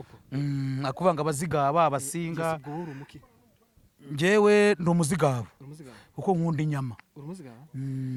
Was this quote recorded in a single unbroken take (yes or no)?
yes